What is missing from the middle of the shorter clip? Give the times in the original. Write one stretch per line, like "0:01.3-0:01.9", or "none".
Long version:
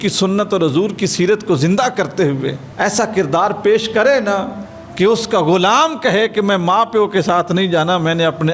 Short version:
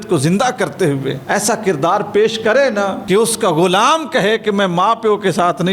0:02.5-0:02.7
0:04.5-0:04.9